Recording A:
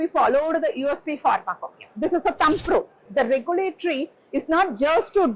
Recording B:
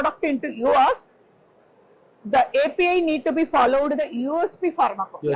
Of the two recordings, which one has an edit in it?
A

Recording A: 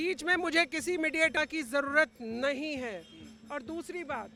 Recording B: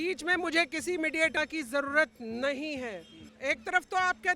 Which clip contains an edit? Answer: B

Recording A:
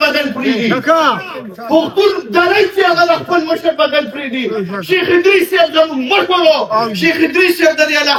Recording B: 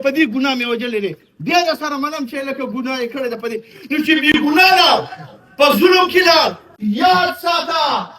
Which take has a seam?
B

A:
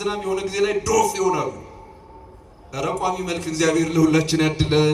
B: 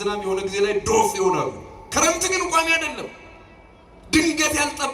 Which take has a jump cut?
B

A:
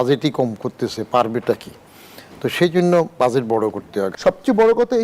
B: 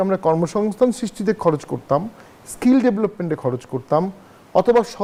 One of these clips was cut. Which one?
A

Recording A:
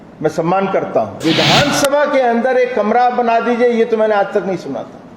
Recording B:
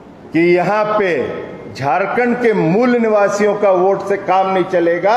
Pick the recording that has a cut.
A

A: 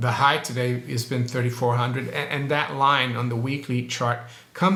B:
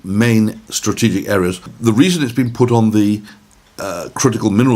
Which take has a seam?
B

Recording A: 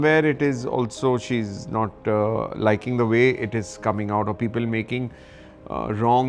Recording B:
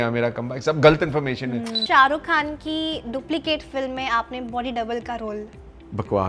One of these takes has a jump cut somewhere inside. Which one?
B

